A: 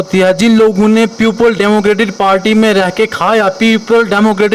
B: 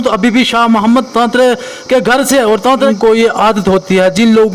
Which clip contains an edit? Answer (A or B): B